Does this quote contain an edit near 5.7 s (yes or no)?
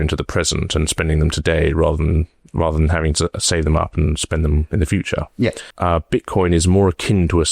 yes